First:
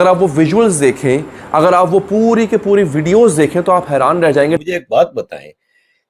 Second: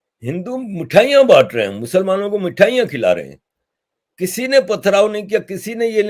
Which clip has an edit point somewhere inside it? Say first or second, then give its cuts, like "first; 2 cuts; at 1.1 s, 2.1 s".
first; 1 cut; at 4.6 s